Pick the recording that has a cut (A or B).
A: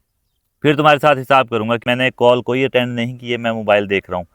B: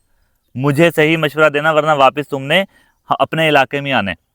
A